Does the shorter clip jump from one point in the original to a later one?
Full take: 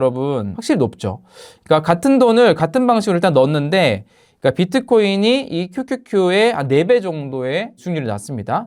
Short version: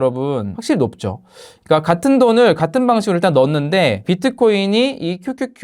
yes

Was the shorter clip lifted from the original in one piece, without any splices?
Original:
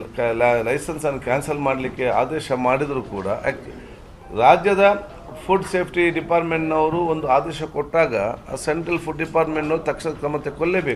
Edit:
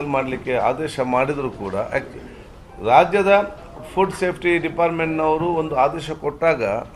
yes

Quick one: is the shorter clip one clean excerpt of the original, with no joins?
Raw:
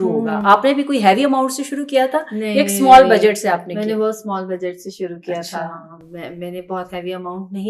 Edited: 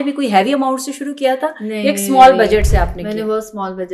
yes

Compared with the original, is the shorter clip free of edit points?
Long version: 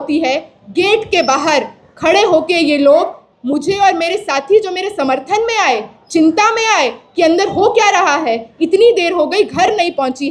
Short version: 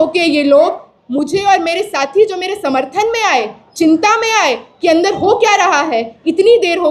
yes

